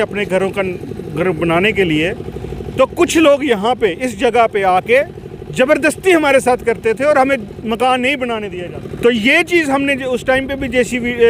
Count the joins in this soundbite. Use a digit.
1